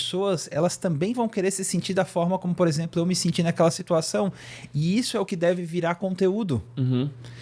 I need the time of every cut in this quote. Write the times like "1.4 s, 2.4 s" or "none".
none